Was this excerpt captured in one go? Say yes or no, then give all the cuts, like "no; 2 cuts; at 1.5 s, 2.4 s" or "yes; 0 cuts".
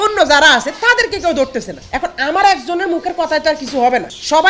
yes; 0 cuts